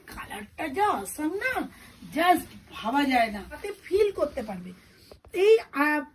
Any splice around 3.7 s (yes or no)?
yes